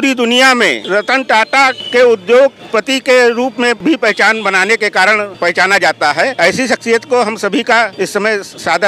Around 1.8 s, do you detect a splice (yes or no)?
yes